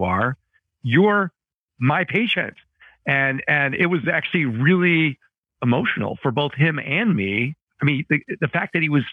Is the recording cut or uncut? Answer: uncut